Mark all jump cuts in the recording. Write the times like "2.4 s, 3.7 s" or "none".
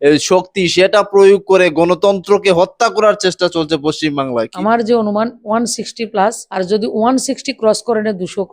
4.5 s, 5.4 s, 6.4 s